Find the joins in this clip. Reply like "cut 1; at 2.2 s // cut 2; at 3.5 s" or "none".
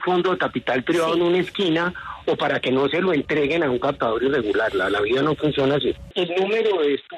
cut 1; at 6.1 s